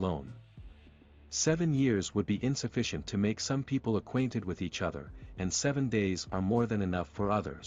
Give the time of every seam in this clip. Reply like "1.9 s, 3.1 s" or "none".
none